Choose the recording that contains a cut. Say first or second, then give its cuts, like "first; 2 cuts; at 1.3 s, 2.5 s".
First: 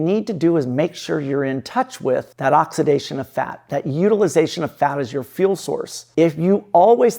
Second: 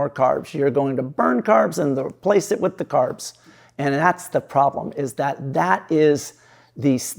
first; 2 cuts; at 2.3 s, 6.0 s